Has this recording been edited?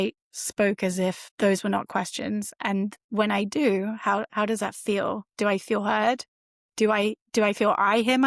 no; 0 cuts

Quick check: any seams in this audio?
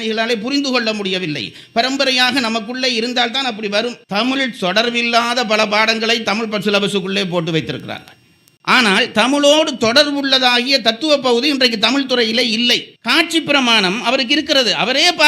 yes; 2 cuts; at 4.0 s, 12.9 s

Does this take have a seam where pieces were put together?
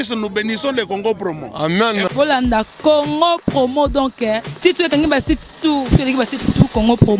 no; 0 cuts

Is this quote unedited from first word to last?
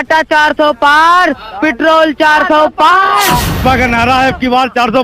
no; 1 cut; at 3.6 s

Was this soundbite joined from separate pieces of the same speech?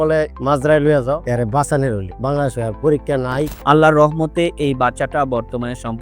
yes; 2 cuts; at 1.2 s, 3.5 s

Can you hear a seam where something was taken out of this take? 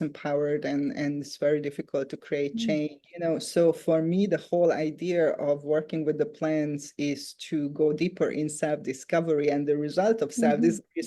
no; 0 cuts

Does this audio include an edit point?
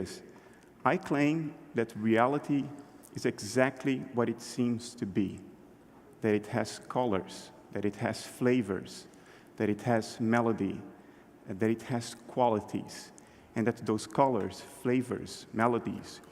yes; 1 cut; at 10.8 s

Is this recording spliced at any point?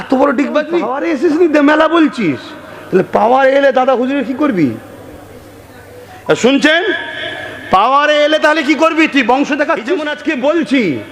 yes; 2 cuts; at 0.9 s, 10.1 s

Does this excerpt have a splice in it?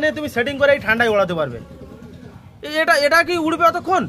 no; 0 cuts

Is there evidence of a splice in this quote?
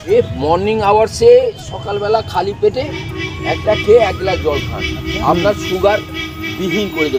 no; 0 cuts

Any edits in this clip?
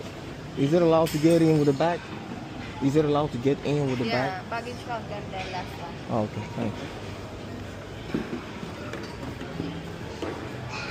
no; 0 cuts

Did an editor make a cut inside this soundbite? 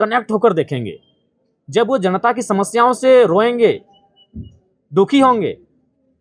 no; 0 cuts

